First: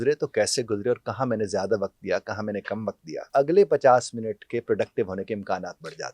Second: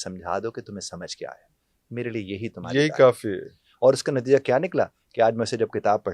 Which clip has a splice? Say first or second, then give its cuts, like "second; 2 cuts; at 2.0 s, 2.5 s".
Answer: first; 1 cut; at 3.3 s